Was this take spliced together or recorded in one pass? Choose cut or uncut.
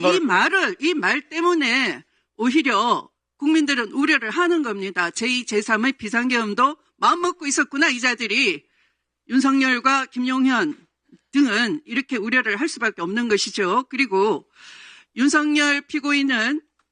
uncut